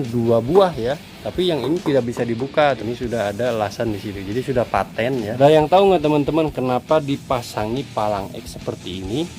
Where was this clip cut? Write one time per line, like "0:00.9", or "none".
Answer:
0:01.1
0:02.8
0:05.4